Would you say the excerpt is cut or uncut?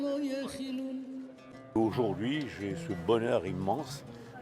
cut